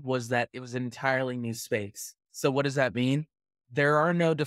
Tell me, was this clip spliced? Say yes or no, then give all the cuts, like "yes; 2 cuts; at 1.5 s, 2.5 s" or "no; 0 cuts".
no; 0 cuts